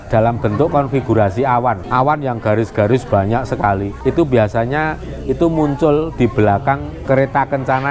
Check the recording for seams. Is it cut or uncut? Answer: uncut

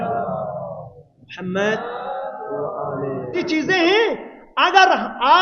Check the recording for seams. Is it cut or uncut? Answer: cut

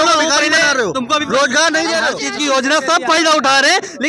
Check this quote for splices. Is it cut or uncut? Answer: cut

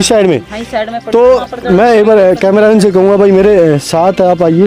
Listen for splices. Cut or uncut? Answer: uncut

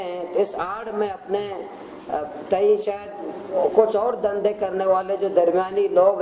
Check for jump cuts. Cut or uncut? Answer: uncut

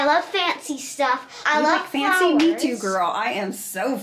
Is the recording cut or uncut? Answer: cut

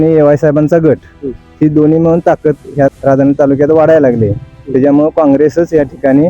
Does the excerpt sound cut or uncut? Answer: cut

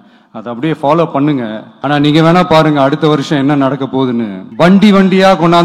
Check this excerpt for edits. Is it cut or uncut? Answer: cut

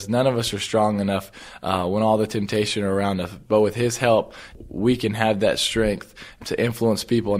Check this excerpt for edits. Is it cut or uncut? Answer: uncut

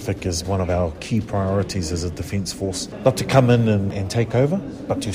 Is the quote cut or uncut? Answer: cut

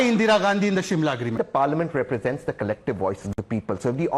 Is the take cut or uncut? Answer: cut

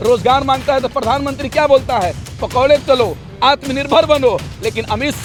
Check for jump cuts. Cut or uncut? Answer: uncut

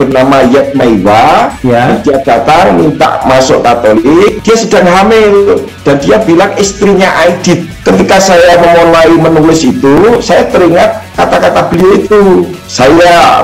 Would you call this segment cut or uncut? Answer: cut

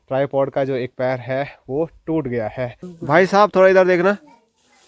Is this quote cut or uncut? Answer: cut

